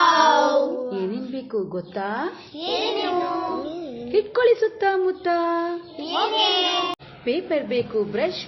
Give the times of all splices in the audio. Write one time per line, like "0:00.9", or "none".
0:07.0